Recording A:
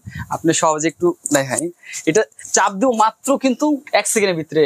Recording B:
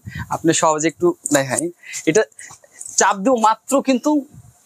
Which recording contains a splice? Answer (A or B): A